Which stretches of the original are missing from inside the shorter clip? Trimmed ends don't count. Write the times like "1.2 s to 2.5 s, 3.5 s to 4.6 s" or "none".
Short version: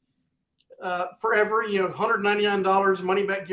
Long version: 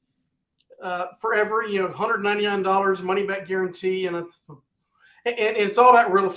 none